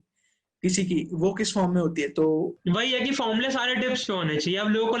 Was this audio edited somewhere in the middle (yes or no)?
yes